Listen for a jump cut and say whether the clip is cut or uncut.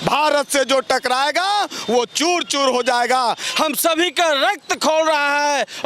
cut